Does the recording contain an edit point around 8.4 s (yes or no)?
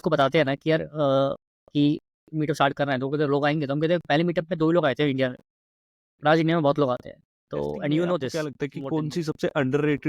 yes